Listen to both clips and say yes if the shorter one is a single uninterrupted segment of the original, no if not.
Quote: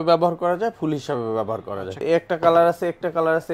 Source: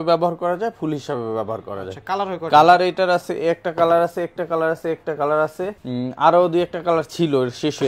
no